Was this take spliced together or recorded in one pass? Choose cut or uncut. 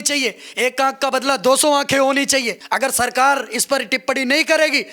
cut